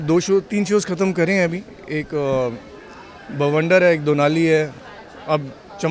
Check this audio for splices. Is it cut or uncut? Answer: uncut